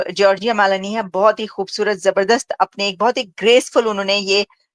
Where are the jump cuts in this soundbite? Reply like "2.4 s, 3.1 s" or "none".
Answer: none